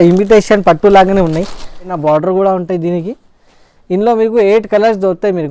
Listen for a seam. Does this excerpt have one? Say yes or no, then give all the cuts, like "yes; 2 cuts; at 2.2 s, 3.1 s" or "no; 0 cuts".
yes; 1 cut; at 1.8 s